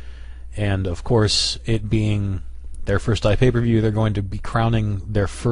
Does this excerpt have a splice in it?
yes; 1 cut; at 3.3 s

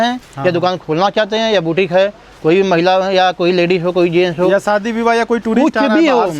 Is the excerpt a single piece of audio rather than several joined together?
yes; 0 cuts

